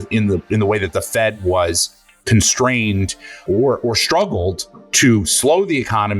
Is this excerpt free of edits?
no; 1 cut; at 3.4 s

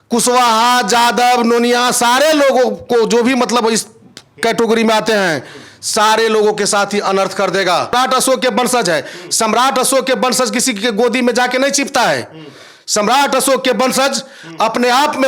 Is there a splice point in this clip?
yes; 1 cut; at 7.9 s

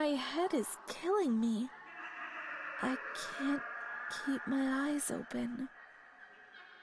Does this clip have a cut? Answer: yes; 1 cut; at 5.8 s

